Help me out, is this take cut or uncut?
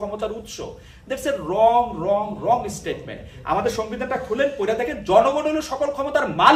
uncut